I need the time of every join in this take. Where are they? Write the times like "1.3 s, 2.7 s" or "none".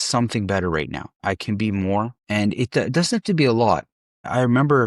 1.0 s